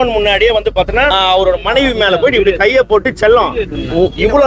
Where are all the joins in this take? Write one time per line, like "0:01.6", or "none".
0:01.1